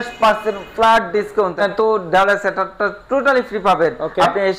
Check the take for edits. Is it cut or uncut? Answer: cut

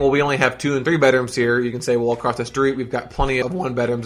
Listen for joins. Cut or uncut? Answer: uncut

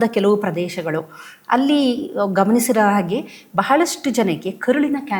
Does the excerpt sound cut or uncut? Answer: uncut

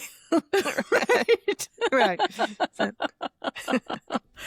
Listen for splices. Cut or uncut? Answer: uncut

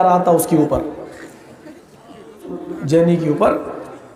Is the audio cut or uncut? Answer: cut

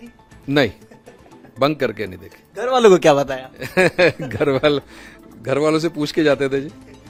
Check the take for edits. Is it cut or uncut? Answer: uncut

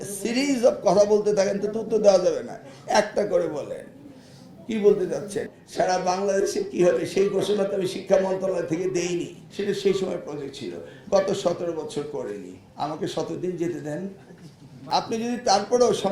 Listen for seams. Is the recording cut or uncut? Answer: cut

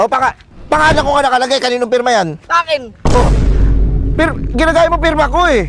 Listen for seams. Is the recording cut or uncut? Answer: uncut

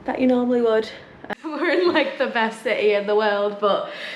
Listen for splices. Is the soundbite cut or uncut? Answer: cut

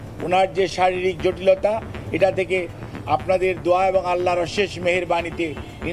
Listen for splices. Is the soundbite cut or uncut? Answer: uncut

